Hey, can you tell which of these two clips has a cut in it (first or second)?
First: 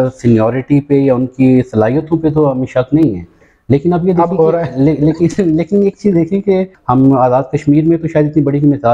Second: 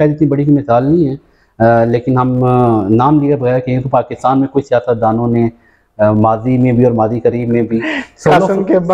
first